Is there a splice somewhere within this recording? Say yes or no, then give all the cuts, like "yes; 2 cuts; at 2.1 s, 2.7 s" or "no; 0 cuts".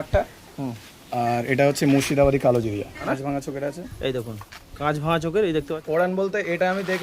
yes; 2 cuts; at 3.1 s, 5.8 s